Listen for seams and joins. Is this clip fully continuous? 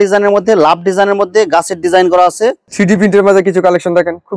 no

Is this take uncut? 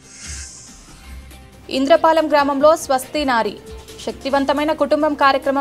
no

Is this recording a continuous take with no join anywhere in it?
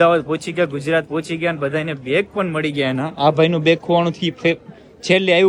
yes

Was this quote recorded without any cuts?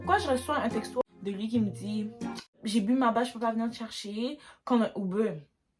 no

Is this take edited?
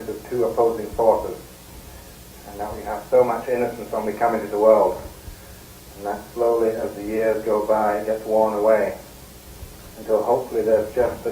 yes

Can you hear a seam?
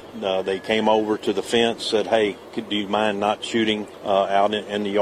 yes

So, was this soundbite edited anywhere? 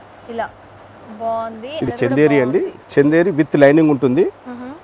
yes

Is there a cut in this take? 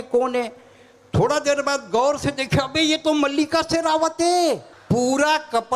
yes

